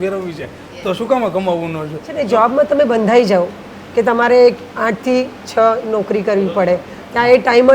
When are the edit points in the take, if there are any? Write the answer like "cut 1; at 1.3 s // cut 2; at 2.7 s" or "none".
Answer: cut 1; at 2.1 s